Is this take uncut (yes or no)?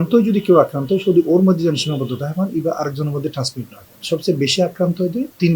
yes